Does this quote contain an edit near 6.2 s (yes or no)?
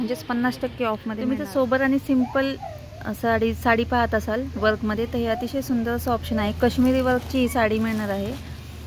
no